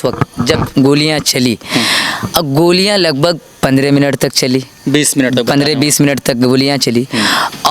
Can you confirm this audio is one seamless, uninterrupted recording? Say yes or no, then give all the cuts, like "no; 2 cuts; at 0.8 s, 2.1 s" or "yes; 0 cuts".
yes; 0 cuts